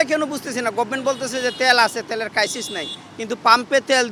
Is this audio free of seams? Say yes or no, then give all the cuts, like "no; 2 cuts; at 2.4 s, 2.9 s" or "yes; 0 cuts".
yes; 0 cuts